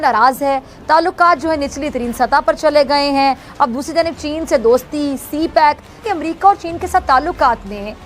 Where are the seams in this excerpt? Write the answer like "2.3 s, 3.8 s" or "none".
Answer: 6.0 s

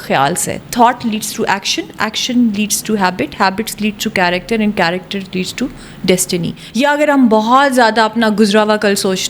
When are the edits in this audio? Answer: 6.6 s

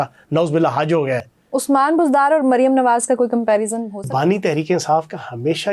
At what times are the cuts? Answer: 1.4 s, 4.1 s

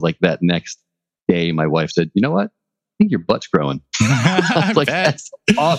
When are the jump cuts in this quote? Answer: none

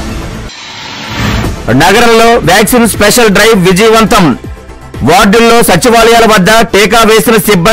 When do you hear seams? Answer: 1.3 s

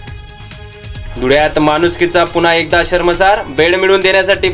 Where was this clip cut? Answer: 1.0 s

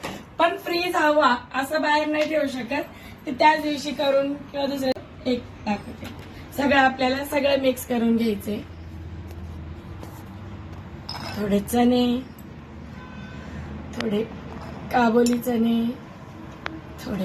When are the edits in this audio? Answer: 5.0 s

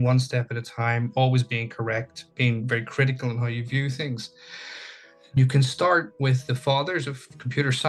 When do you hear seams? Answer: 5.4 s

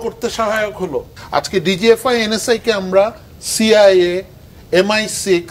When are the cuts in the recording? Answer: 1.2 s

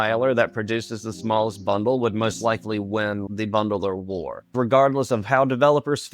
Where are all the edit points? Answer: 3.2 s, 4.5 s

